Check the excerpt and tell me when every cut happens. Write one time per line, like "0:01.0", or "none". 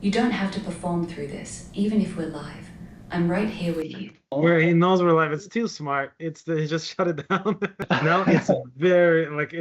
0:04.3
0:07.8